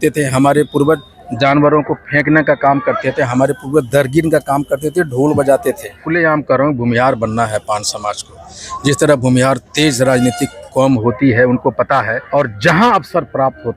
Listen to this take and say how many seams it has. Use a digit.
2